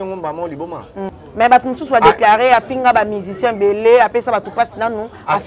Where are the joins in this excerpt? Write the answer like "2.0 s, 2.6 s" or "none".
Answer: 1.1 s